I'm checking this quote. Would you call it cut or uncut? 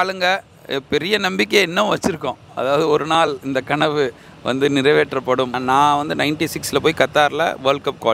cut